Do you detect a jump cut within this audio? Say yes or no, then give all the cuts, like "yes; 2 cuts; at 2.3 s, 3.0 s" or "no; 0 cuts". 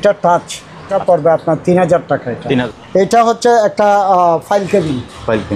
yes; 2 cuts; at 0.9 s, 2.6 s